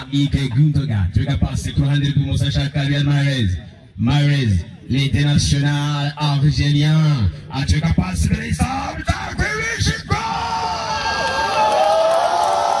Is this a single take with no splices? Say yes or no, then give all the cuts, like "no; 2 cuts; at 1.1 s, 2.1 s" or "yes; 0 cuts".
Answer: yes; 0 cuts